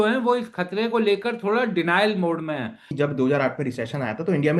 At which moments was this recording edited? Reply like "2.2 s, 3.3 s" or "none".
2.9 s